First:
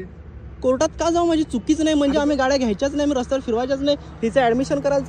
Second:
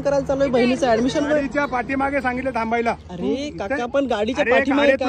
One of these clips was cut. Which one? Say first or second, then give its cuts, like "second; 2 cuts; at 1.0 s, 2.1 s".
second; 1 cut; at 1.3 s